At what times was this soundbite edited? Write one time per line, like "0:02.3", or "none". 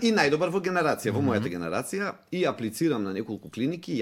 none